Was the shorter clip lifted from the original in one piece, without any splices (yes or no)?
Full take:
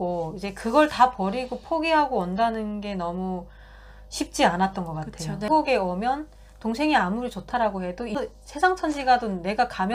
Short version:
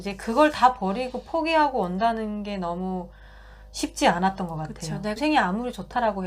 no